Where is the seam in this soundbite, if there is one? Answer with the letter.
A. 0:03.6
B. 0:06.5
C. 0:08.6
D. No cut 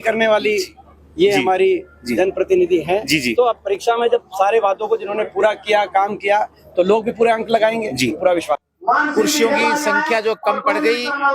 C